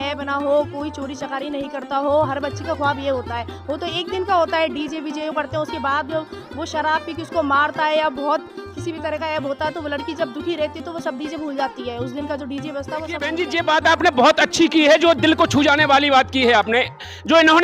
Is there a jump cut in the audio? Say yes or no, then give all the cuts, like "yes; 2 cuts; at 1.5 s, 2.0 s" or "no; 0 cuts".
yes; 1 cut; at 13.2 s